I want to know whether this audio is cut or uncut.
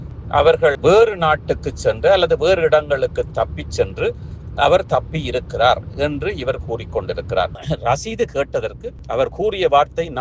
cut